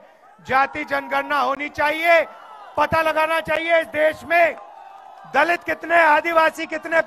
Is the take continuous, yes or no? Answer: yes